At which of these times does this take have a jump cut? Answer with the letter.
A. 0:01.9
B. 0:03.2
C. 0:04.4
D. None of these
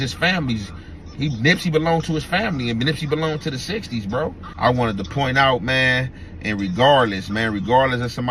C